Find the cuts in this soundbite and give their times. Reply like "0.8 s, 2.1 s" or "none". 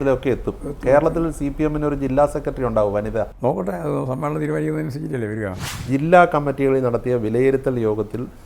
3.3 s, 5.6 s